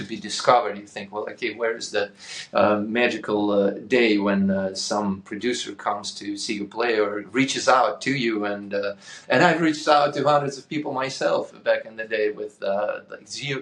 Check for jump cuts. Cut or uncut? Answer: uncut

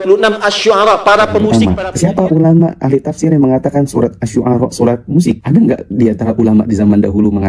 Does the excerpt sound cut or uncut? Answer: cut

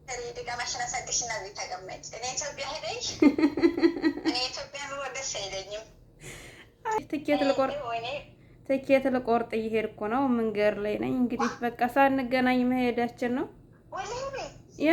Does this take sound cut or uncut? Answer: cut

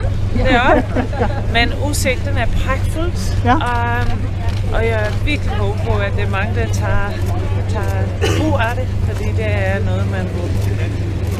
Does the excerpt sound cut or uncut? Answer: uncut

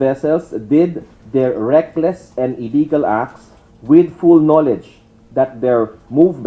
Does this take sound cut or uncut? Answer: uncut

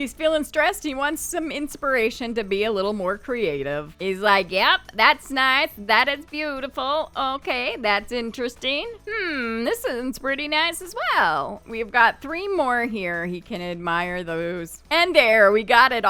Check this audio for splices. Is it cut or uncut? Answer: uncut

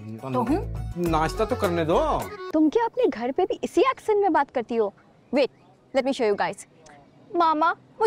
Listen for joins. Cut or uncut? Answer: cut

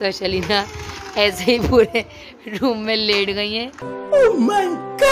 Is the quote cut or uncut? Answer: uncut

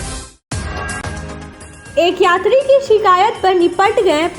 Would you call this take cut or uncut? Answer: cut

